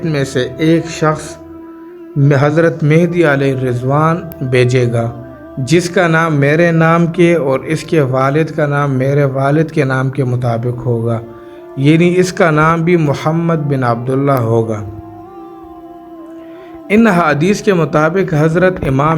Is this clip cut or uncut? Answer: cut